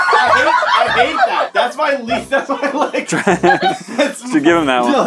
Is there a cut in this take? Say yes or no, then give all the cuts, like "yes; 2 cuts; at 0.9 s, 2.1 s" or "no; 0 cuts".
no; 0 cuts